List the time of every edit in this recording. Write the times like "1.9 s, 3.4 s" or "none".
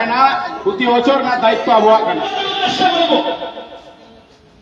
2.5 s